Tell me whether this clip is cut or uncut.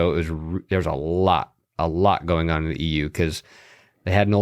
uncut